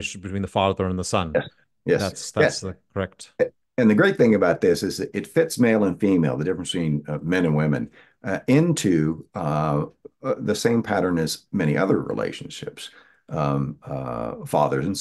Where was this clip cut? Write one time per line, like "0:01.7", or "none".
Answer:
none